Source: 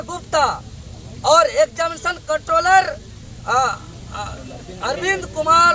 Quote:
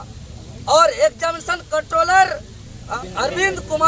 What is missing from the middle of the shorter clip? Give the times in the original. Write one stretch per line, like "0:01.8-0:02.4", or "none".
0:03.3-0:04.4